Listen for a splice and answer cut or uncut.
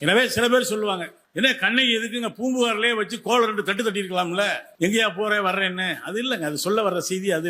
cut